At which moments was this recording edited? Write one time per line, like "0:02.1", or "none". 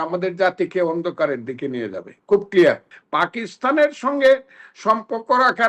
0:03.0